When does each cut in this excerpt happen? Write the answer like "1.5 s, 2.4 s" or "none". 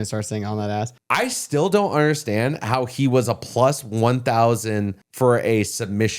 1.0 s